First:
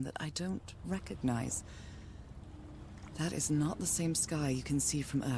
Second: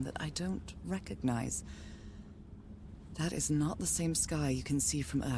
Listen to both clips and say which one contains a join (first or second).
second